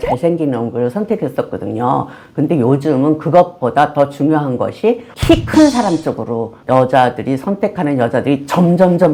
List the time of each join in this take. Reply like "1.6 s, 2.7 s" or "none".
none